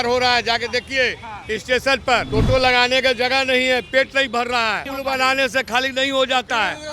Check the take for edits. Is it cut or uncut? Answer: cut